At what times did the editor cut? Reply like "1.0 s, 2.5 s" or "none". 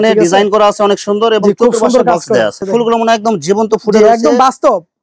2.6 s